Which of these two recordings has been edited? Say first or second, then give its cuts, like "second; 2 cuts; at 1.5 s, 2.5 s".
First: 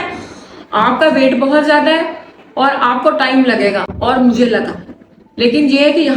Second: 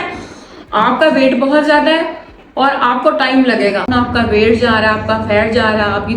second; 1 cut; at 3.9 s